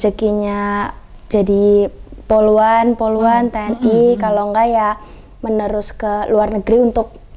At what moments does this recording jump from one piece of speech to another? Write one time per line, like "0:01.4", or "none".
none